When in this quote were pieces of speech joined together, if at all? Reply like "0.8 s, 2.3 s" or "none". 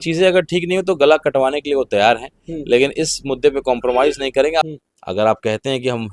4.7 s

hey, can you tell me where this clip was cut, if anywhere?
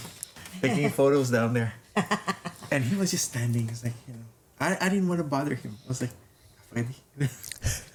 none

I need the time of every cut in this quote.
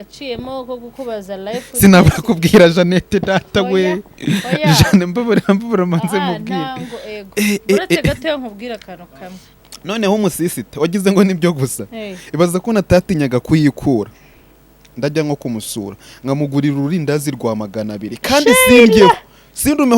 9.5 s

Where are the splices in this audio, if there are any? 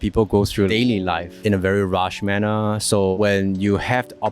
1.3 s, 3.1 s

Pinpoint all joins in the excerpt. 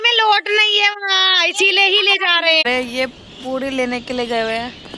2.6 s

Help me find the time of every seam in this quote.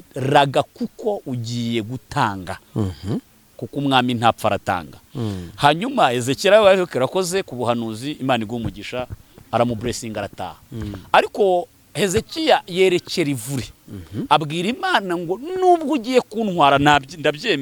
none

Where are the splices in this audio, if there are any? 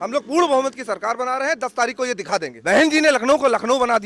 2.5 s

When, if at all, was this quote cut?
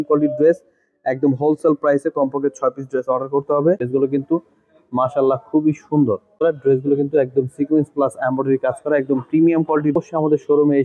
3.9 s, 6.3 s, 10.0 s

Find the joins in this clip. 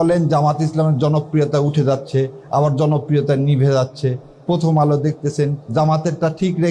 5.7 s

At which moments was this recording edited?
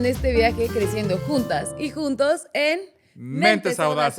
none

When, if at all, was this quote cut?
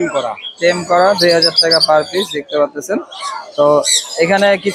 none

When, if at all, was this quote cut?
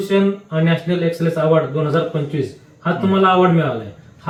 none

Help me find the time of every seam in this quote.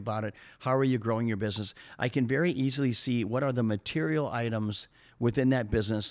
none

